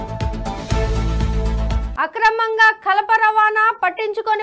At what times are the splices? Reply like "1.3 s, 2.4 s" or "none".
1.9 s